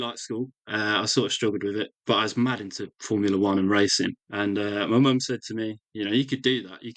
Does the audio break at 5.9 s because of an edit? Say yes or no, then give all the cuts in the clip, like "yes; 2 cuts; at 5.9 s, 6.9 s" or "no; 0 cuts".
no; 2 cuts; at 2.0 s, 4.2 s